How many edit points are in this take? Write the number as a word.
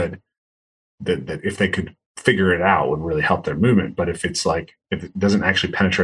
one